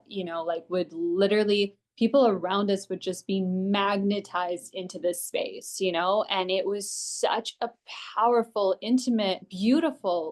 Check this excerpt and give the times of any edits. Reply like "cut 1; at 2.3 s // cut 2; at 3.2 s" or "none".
none